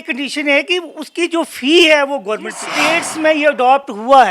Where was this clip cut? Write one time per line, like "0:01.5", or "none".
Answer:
0:03.0